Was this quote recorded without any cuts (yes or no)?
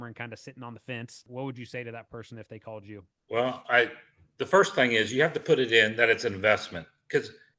no